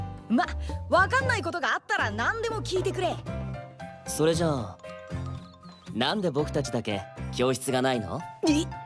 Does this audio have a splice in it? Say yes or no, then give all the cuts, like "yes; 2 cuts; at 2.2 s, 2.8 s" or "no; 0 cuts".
no; 0 cuts